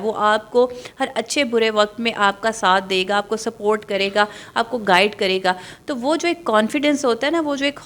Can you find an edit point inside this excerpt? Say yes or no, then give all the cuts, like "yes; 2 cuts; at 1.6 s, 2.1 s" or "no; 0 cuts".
no; 0 cuts